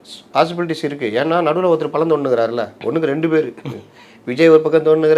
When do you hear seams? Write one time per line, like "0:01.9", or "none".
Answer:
none